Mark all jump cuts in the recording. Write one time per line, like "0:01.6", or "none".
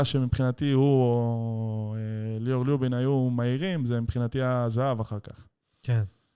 none